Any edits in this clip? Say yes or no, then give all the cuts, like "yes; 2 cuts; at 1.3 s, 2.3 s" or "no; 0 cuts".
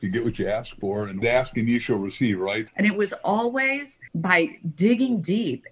yes; 3 cuts; at 1.2 s, 2.6 s, 4.0 s